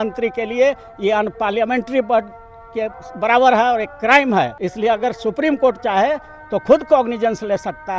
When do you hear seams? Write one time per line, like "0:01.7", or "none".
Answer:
0:04.6